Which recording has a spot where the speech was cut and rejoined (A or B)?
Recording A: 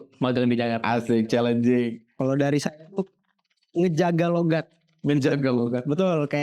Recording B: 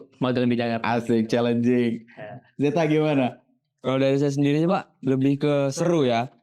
A